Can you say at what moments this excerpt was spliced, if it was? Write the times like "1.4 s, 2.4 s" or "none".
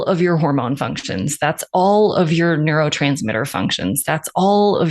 none